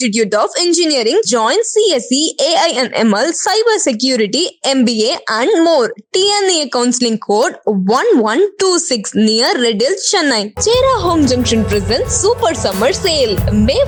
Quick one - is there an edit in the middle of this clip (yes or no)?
no